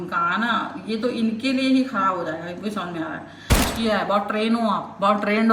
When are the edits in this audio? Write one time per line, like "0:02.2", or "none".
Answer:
0:03.5